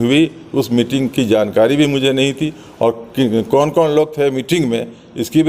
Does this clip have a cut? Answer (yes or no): no